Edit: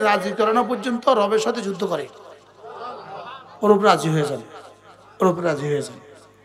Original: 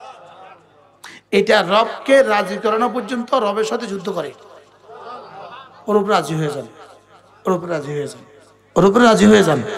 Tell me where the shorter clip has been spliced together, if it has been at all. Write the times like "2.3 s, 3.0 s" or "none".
none

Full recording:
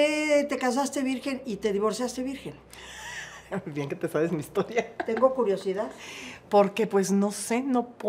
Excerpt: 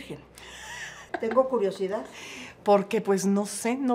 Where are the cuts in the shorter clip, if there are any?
1.1 s

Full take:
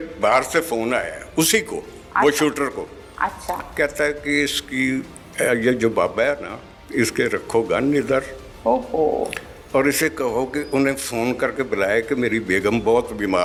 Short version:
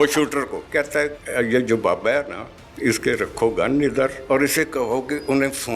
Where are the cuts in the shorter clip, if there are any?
0.9 s, 4.2 s

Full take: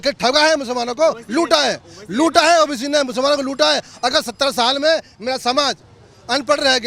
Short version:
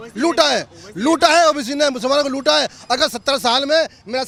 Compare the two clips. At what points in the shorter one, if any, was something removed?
none

